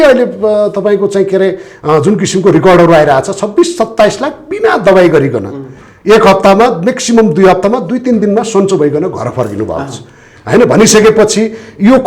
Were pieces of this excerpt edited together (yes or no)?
no